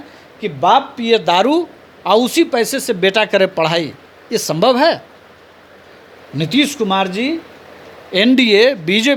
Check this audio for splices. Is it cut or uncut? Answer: uncut